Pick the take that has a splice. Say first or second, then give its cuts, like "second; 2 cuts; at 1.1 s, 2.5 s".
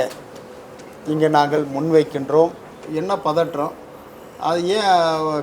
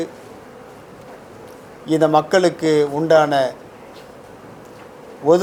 first; 1 cut; at 2.9 s